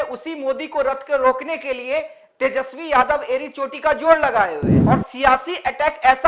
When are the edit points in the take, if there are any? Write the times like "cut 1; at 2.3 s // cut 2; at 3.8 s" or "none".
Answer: cut 1; at 4.7 s